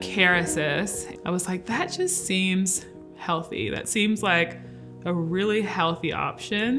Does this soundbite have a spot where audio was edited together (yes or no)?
yes